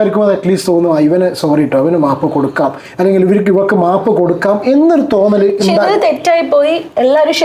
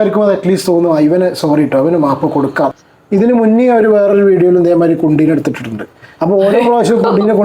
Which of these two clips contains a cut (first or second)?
second